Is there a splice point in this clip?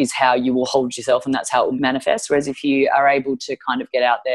yes; 1 cut; at 1.7 s

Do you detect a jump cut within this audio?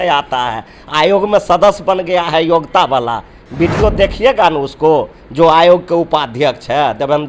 no; 0 cuts

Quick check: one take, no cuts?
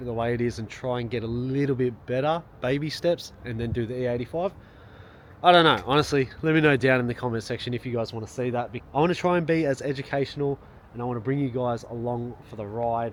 yes; 0 cuts

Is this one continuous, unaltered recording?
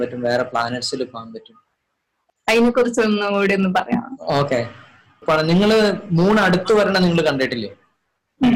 no; 2 cuts; at 2.3 s, 5.2 s

